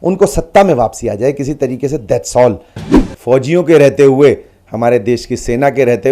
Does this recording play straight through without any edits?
no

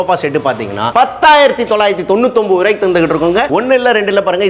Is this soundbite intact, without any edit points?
yes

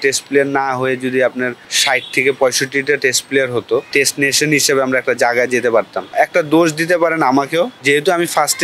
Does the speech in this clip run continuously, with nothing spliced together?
no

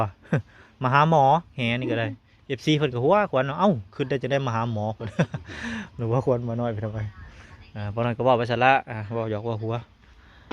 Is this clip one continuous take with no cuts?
yes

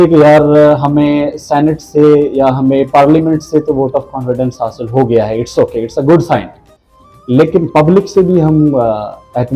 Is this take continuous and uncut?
yes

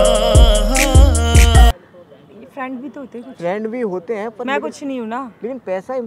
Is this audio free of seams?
no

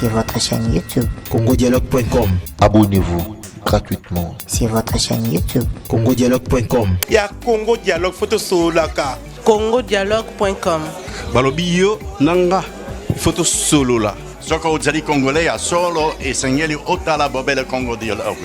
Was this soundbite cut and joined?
yes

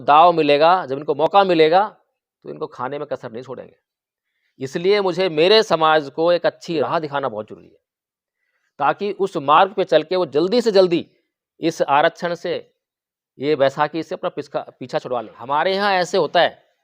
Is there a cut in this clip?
yes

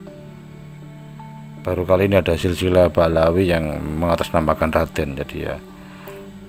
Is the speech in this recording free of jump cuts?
yes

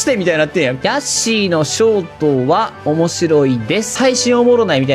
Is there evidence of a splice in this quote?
yes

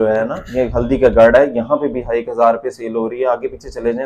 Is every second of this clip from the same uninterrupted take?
yes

